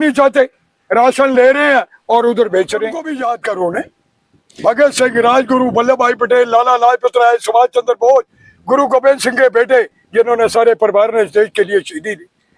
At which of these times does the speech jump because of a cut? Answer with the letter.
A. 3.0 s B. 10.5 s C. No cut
A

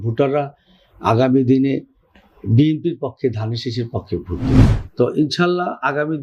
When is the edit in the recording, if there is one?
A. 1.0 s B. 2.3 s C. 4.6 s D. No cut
C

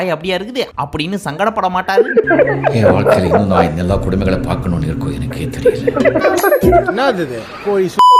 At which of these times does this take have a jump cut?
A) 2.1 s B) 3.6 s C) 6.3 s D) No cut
C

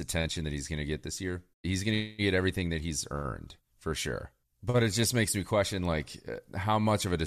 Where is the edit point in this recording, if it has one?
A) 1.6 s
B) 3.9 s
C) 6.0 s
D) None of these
A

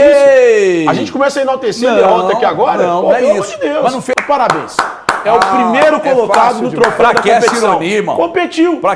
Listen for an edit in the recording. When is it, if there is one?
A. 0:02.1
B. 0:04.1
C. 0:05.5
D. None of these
B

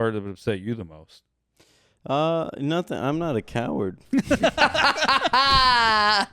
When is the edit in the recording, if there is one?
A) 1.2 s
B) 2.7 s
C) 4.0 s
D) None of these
C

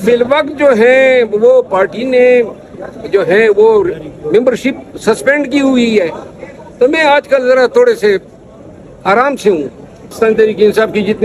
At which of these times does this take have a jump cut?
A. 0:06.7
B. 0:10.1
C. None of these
B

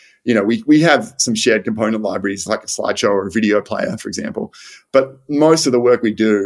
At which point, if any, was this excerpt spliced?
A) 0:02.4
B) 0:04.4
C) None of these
A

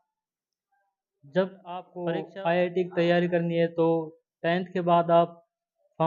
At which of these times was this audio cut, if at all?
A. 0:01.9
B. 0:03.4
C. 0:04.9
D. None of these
A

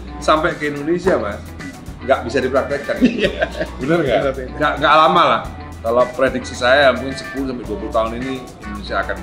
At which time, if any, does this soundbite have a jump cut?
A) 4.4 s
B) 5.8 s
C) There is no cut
A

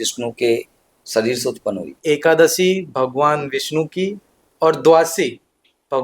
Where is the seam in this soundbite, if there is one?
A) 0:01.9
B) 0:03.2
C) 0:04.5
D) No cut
A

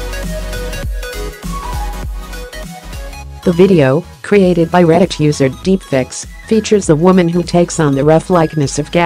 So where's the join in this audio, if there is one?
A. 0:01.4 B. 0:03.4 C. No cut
B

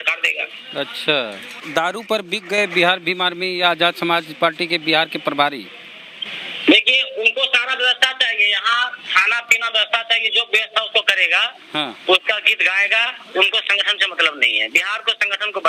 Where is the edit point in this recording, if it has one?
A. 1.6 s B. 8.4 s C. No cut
A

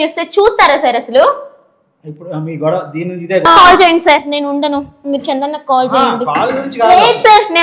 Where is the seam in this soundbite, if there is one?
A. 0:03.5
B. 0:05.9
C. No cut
A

